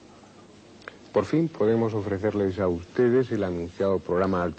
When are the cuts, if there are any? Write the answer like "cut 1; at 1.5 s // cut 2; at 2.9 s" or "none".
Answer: none